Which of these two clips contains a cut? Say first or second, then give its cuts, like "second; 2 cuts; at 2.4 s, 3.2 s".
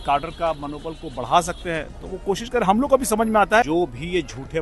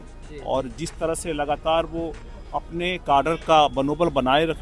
first; 1 cut; at 3.7 s